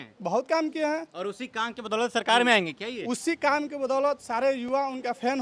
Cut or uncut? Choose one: uncut